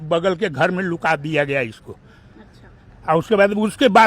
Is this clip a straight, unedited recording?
yes; 0 cuts

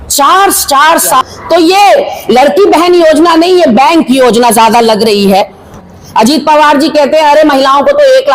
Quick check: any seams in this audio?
yes; 2 cuts; at 1.2 s, 5.7 s

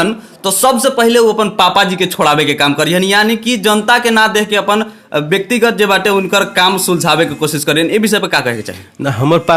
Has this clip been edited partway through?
no; 0 cuts

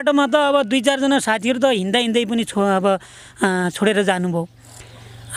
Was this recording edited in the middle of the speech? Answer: no; 0 cuts

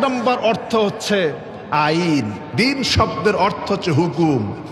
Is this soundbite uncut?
no; 1 cut; at 2.4 s

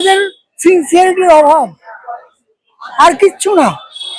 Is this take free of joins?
yes; 0 cuts

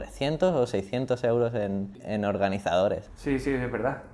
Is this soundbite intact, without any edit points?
no; 2 cuts; at 2.0 s, 3.1 s

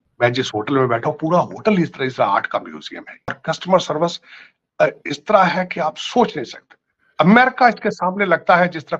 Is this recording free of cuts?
no; 1 cut; at 3.4 s

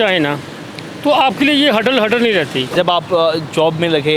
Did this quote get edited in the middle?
yes; 1 cut; at 2.7 s

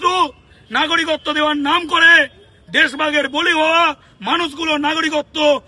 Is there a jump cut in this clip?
no; 0 cuts

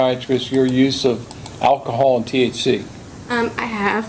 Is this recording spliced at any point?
no; 0 cuts

